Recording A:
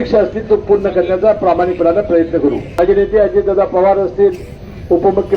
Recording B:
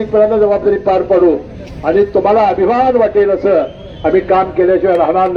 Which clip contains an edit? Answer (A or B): A